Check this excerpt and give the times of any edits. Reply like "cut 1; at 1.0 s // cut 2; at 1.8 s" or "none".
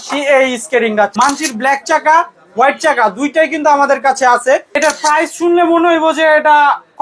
cut 1; at 1.1 s // cut 2; at 4.8 s